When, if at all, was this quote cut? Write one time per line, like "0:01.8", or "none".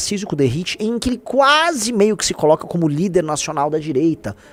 none